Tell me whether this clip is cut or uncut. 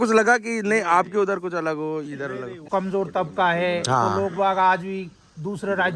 cut